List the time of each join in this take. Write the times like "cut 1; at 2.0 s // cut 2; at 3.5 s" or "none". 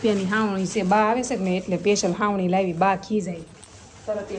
none